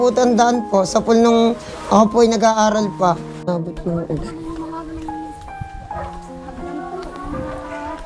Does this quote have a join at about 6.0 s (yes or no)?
no